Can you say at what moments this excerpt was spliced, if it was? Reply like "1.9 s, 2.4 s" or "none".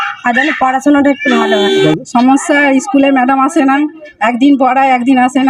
1.9 s